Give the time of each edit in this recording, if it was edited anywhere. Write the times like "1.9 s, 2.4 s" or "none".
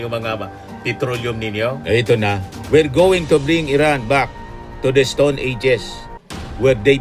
1.8 s